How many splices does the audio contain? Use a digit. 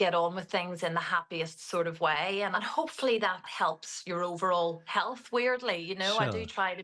2